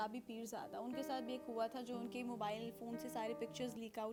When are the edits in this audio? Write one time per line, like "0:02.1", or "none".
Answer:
none